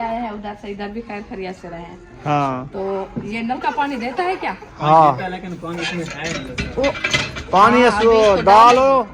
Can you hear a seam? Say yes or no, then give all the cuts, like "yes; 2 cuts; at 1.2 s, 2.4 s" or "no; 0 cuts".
no; 0 cuts